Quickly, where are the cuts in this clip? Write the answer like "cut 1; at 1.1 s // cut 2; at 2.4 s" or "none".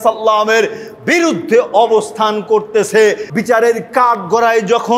cut 1; at 3.3 s